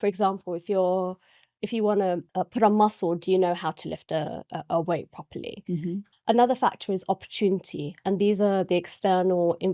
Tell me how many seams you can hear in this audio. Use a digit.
2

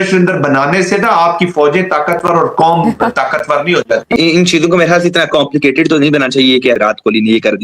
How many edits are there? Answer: 2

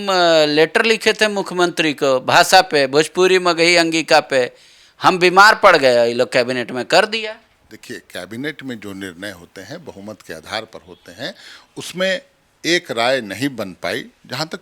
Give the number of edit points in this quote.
0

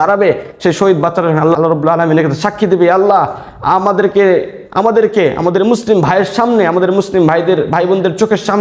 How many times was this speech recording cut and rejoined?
1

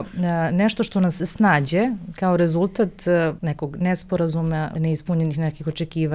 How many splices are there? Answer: 2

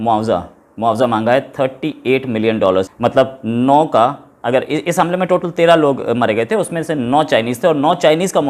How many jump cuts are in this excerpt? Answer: 0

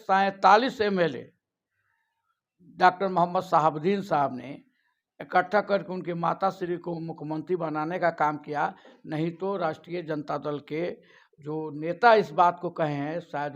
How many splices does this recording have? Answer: 0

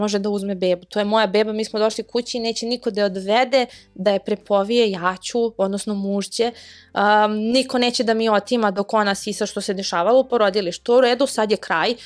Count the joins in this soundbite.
0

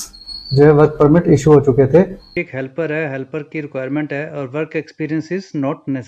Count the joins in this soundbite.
1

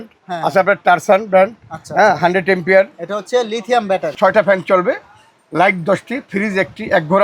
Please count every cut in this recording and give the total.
1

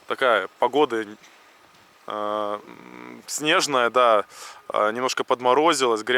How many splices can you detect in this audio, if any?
0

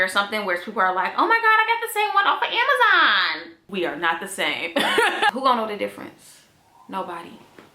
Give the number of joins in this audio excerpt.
1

